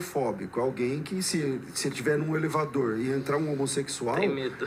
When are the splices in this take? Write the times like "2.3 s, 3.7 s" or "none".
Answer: none